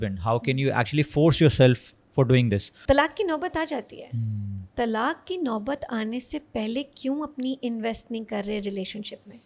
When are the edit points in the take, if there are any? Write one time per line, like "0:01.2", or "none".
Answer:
0:02.7